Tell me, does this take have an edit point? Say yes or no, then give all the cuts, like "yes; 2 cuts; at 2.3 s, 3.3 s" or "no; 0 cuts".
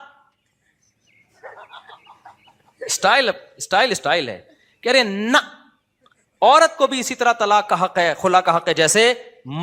no; 0 cuts